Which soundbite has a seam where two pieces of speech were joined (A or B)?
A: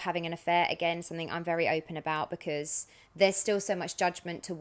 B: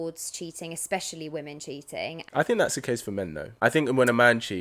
B